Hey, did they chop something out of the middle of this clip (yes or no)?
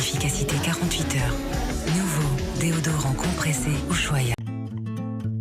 yes